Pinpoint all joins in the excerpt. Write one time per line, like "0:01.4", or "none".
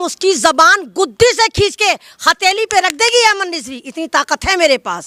none